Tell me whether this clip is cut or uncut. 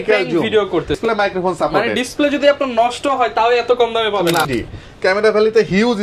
cut